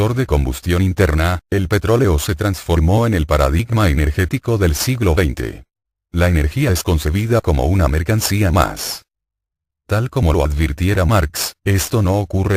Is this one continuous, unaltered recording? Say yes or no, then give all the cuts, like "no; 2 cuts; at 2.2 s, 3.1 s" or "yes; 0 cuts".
yes; 0 cuts